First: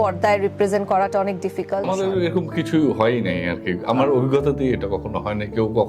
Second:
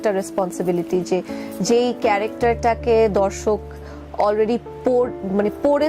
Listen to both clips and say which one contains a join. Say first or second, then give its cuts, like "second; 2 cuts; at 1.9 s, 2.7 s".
first; 1 cut; at 1.8 s